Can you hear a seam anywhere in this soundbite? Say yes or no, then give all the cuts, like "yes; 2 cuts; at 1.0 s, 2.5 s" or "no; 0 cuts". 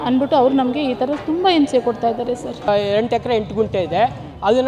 yes; 1 cut; at 2.7 s